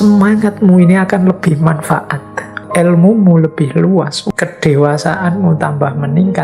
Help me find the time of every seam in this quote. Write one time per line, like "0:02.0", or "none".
0:02.6
0:04.2